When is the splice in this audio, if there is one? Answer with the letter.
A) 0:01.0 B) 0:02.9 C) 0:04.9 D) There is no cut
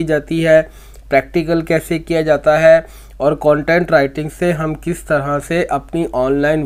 D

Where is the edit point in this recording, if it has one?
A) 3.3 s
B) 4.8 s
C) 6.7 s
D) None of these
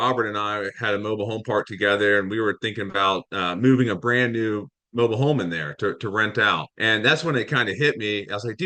C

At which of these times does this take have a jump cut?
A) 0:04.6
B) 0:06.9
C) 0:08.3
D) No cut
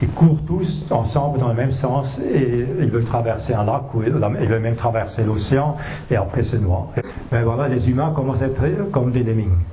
B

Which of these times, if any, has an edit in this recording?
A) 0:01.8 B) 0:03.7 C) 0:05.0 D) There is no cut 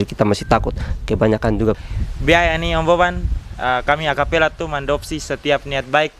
A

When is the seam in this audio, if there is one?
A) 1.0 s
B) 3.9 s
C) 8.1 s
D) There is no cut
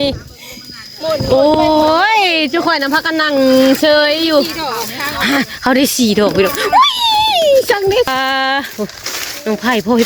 C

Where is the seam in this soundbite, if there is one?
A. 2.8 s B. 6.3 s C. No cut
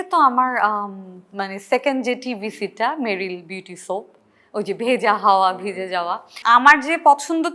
B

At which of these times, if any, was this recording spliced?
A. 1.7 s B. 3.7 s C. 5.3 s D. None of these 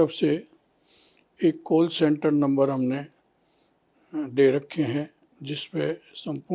D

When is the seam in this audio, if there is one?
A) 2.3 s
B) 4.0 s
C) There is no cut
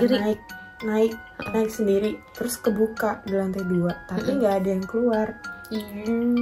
A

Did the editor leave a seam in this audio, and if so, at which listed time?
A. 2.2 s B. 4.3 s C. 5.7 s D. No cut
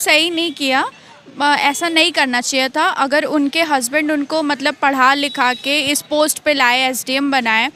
D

